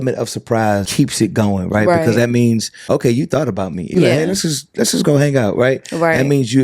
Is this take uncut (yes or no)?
no